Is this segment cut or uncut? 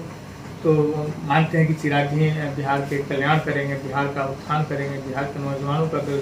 uncut